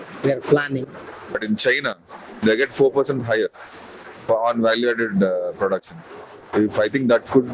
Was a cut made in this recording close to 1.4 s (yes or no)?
yes